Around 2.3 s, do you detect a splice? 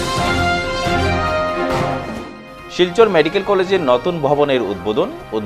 yes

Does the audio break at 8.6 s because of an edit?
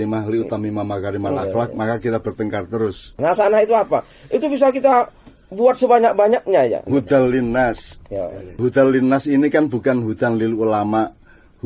yes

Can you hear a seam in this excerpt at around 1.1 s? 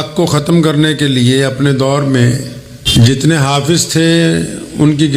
no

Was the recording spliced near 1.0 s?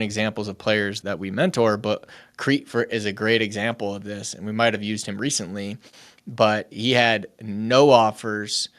yes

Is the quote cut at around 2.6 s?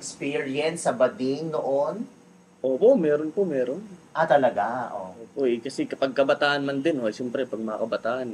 no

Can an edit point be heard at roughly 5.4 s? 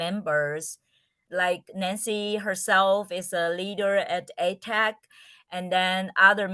no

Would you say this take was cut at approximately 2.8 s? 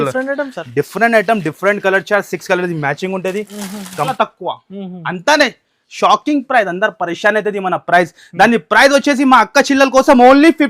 no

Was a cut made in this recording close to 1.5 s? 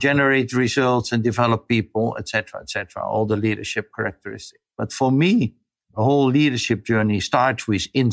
no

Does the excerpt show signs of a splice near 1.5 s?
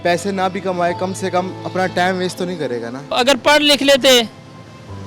no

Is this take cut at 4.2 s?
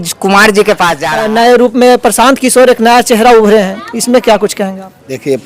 no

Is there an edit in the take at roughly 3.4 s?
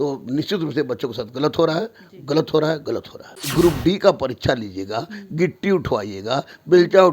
yes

